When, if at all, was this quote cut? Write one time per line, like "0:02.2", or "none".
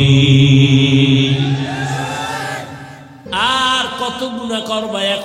0:03.3